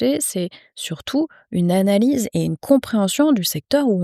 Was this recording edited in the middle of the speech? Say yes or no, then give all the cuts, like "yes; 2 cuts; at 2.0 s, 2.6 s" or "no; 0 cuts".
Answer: no; 0 cuts